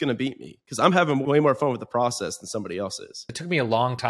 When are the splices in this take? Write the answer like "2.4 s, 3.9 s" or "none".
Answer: 1.2 s, 3.1 s